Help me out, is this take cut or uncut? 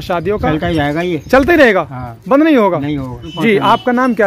uncut